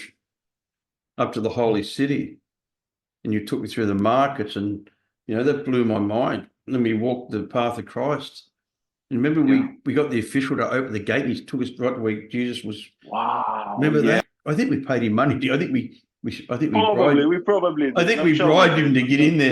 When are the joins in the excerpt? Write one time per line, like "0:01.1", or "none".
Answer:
0:14.2